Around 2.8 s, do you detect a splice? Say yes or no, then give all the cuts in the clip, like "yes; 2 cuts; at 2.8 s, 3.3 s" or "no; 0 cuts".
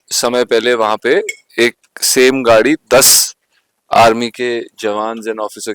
no; 0 cuts